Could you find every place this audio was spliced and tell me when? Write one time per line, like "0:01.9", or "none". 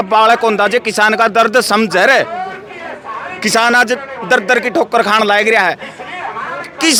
none